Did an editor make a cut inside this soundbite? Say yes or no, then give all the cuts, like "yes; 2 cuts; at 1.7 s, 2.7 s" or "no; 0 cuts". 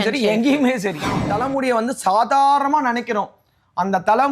yes; 1 cut; at 1.2 s